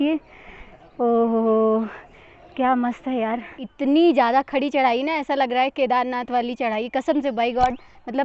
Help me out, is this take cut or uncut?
cut